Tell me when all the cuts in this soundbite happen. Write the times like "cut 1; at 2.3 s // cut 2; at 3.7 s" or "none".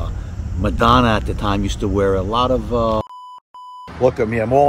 cut 1; at 3.2 s